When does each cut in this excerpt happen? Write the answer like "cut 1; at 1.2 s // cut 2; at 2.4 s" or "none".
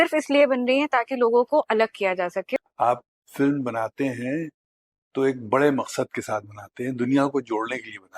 cut 1; at 2.6 s

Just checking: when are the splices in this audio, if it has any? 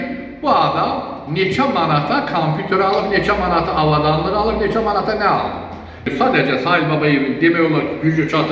cut 1; at 6.1 s

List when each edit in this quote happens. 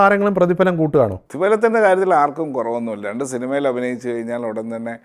cut 1; at 1.2 s

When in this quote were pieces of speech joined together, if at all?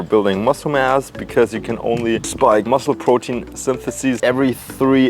cut 1; at 2.7 s // cut 2; at 4.2 s

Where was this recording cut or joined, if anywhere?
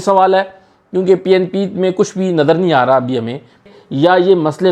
cut 1; at 3.6 s

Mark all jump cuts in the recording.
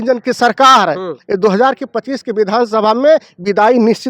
none

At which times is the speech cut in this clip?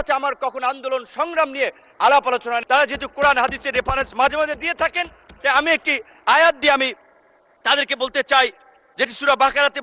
cut 1; at 2.6 s

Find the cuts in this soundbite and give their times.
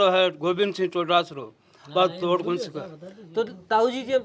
none

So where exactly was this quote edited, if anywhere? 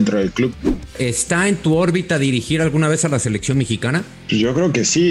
cut 1; at 0.8 s // cut 2; at 4.1 s

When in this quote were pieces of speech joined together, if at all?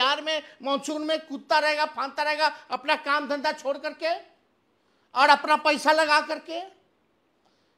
none

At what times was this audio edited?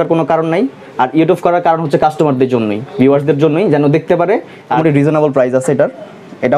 cut 1; at 4.8 s

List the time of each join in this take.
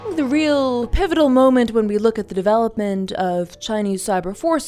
cut 1; at 0.9 s

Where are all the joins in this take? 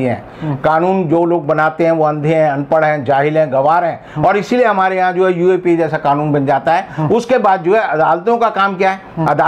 none

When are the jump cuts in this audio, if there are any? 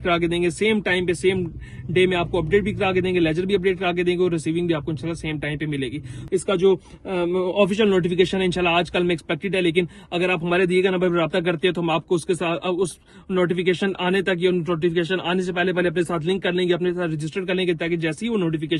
cut 1; at 6.1 s

